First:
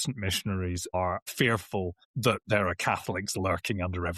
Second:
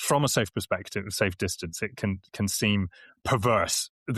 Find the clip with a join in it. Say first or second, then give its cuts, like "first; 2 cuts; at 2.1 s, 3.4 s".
first; 2 cuts; at 1.0 s, 2.0 s